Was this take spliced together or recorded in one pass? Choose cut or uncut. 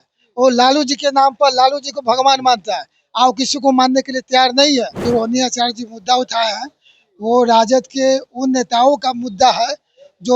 cut